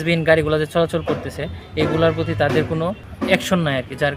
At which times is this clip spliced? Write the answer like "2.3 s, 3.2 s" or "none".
3.0 s